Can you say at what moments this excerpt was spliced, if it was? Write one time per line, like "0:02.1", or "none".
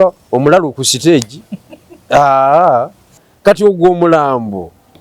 0:03.2